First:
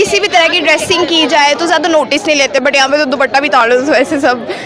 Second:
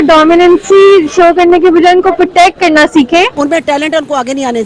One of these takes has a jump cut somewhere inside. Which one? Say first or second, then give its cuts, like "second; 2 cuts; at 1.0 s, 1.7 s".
second; 1 cut; at 3.3 s